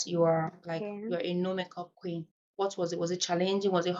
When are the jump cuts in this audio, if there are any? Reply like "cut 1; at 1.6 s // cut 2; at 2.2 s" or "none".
none